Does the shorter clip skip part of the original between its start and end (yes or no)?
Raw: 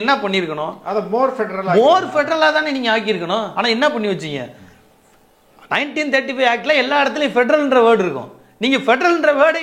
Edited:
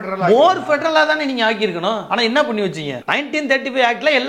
yes